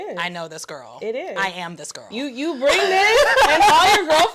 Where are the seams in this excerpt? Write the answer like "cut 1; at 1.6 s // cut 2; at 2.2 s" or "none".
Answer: none